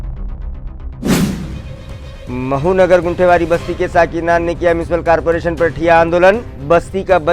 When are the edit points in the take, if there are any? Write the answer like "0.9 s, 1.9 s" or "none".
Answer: 1.5 s